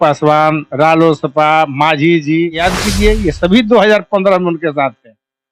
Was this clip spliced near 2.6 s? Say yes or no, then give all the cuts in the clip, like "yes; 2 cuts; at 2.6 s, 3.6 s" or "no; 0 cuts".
yes; 1 cut; at 2.6 s